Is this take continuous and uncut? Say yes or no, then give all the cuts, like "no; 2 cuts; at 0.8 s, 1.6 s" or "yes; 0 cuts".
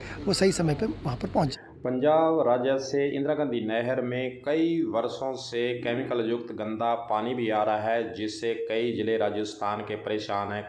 yes; 0 cuts